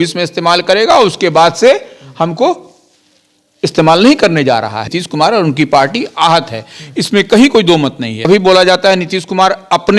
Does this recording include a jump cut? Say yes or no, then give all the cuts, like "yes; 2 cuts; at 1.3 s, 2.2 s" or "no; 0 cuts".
yes; 2 cuts; at 4.9 s, 8.2 s